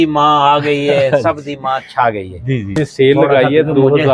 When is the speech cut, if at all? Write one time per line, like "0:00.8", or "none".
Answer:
0:02.8